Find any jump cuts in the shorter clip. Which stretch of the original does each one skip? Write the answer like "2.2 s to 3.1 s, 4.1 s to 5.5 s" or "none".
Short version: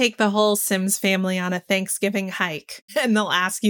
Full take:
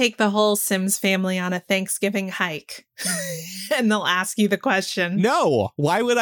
2.7 s to 3.5 s